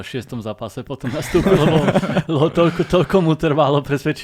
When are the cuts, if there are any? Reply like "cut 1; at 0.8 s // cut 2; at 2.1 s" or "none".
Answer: none